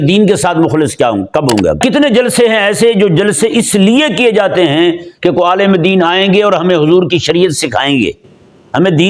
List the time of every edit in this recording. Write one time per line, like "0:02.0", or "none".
0:01.8